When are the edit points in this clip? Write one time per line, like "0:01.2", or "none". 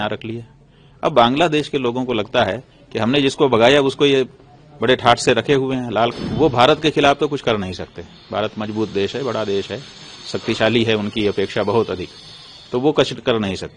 0:06.1